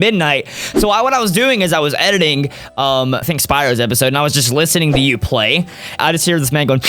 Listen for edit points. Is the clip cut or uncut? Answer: cut